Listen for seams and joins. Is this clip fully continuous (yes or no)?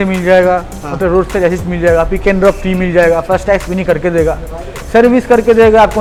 yes